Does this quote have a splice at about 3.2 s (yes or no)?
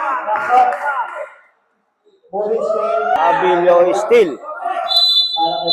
yes